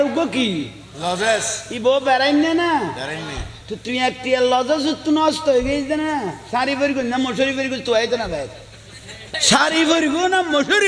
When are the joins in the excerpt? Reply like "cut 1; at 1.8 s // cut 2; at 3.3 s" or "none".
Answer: cut 1; at 9.2 s